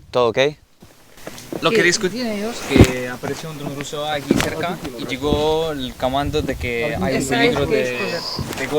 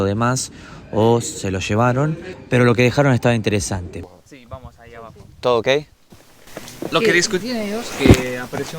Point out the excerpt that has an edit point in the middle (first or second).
second